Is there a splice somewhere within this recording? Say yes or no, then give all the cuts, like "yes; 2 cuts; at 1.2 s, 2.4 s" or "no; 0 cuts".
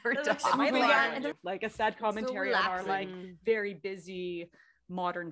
yes; 1 cut; at 1.4 s